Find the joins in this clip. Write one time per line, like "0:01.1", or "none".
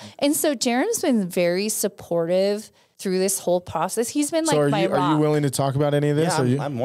none